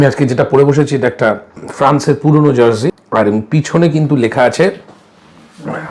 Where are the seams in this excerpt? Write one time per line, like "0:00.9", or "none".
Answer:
0:01.6
0:03.0